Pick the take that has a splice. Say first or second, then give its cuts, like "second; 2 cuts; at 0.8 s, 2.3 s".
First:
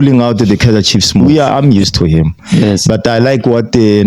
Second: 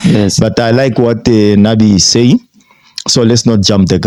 first; 1 cut; at 1.5 s